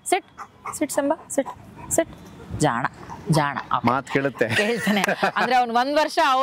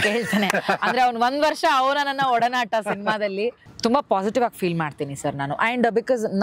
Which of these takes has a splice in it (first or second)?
second